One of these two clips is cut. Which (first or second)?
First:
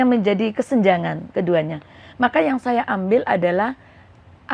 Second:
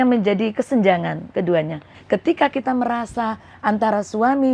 second